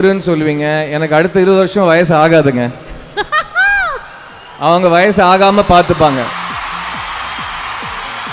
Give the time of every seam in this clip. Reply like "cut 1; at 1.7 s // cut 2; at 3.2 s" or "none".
cut 1; at 6.9 s